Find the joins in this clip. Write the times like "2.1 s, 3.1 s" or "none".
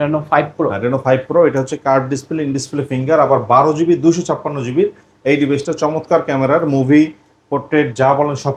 none